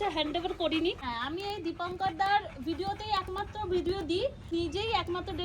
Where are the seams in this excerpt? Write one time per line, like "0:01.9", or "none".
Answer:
0:01.0
0:04.5